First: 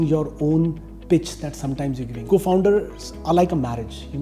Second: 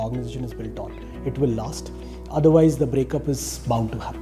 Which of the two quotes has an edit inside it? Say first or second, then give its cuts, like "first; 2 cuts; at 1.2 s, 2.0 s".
first; 1 cut; at 2.1 s